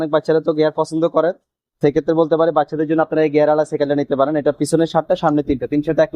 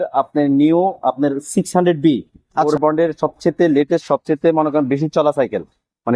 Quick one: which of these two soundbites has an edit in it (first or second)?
second